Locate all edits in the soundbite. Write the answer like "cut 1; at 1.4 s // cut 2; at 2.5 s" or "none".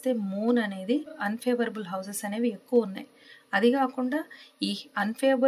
cut 1; at 1.1 s